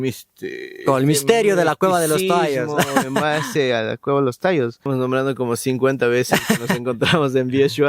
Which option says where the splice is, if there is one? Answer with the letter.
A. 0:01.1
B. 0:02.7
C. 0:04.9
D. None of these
C